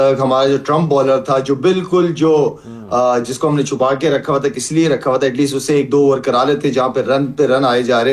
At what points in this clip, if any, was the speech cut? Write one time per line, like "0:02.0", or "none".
none